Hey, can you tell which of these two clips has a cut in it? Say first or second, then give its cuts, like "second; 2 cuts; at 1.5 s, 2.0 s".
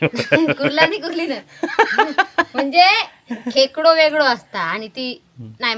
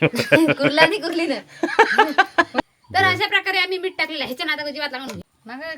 second; 1 cut; at 2.6 s